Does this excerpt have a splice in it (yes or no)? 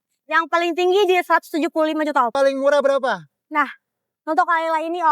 yes